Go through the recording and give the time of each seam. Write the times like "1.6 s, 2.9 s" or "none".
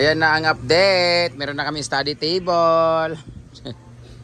none